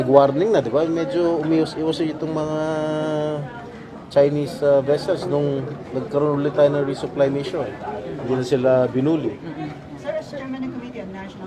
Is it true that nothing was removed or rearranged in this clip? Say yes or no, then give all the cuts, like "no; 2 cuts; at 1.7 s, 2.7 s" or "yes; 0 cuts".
yes; 0 cuts